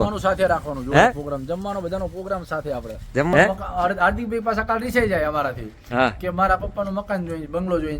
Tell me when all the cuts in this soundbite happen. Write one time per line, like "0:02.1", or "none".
0:03.3